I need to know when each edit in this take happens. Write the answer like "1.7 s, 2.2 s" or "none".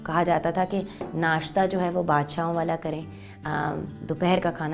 none